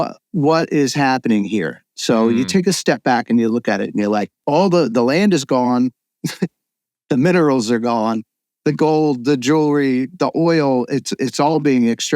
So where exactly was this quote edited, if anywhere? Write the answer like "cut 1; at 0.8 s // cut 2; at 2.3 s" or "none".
cut 1; at 4.4 s

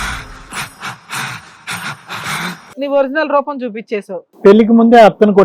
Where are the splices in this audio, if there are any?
cut 1; at 2.8 s // cut 2; at 4.2 s

